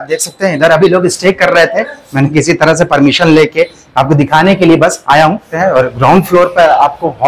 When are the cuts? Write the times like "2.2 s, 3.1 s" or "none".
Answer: 5.5 s

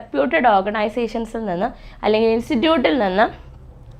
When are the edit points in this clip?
none

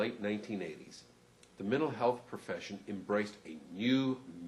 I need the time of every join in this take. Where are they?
2.3 s

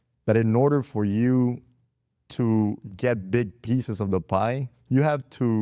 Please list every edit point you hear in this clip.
none

